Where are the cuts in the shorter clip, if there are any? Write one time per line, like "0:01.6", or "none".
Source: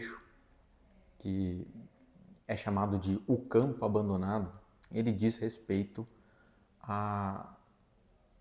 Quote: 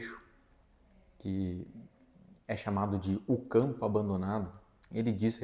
none